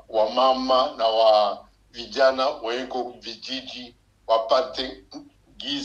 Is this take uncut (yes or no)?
yes